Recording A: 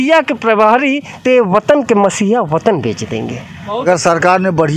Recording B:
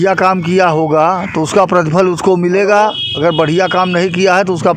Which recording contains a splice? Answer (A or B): A